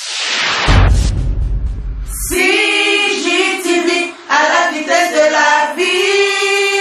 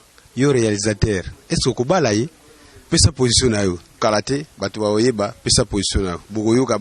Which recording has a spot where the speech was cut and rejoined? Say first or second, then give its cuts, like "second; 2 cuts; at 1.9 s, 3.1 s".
second; 1 cut; at 4.0 s